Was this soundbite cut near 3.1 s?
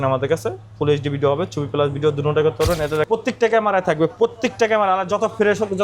yes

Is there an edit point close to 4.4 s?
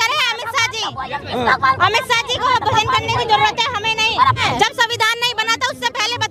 yes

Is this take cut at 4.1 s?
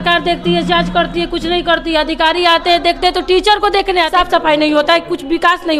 yes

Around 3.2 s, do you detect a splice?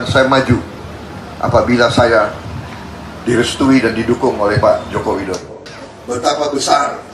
no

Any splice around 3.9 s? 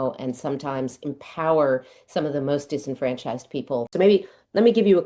yes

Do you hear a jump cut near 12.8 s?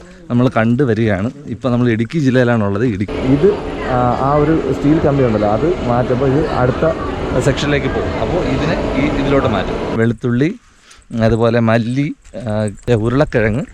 yes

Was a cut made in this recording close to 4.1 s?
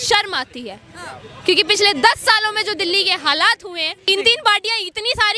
yes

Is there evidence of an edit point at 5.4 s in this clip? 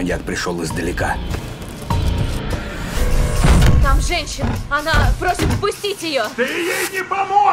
no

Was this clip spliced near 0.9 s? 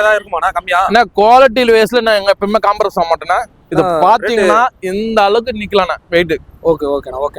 no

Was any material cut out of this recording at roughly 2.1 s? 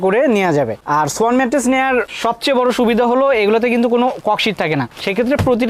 no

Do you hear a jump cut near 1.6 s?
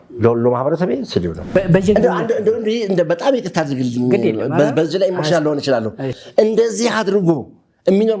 yes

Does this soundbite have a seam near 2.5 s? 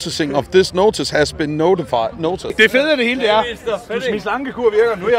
yes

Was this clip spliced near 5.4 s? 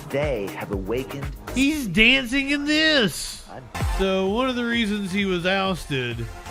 no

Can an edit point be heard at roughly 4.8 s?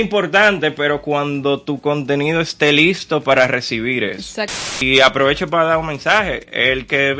yes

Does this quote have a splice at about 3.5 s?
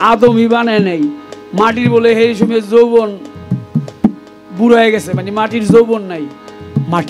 no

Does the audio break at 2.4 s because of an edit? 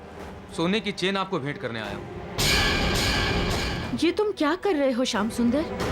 no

